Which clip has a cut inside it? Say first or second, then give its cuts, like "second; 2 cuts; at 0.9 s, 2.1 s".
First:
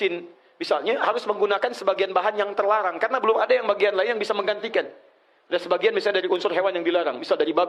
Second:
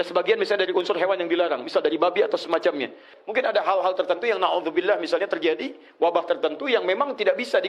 second; 1 cut; at 3.1 s